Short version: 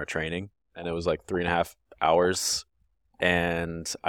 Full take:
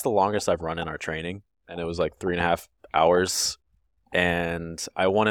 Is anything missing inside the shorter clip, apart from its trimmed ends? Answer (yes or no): no